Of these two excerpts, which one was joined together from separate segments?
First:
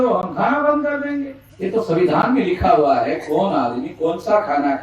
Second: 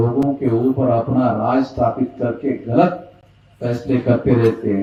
first; 1 cut; at 1.4 s

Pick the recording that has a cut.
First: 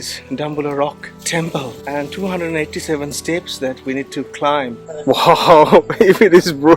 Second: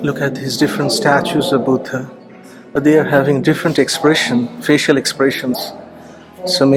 first; 1 cut; at 4.8 s

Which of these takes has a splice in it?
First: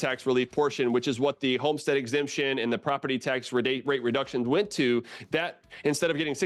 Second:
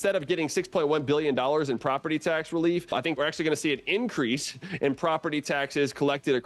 second; 1 cut; at 3.2 s

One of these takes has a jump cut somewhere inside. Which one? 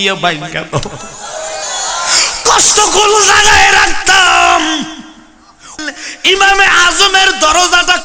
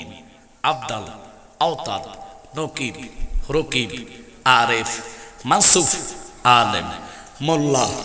first; 1 cut; at 5.8 s

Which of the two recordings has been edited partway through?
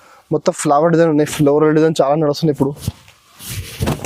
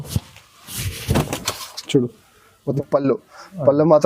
second; 1 cut; at 2.7 s

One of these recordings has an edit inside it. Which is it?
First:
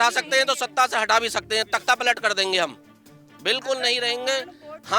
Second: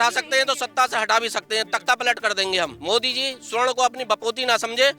second; 1 cut; at 2.8 s

